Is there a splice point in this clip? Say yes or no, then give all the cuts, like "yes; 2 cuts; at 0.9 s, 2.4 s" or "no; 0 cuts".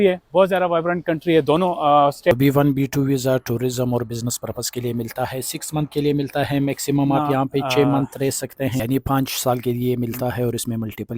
yes; 2 cuts; at 2.3 s, 8.8 s